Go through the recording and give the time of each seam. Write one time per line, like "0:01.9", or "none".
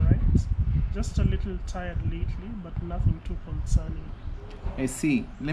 0:04.3